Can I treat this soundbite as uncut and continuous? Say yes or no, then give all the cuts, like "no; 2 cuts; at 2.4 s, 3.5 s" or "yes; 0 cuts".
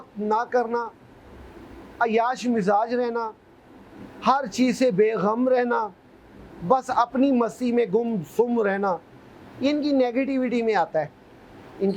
yes; 0 cuts